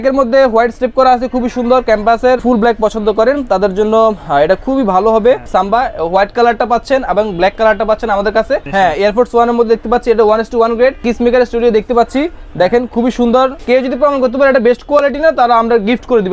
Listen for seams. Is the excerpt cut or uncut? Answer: cut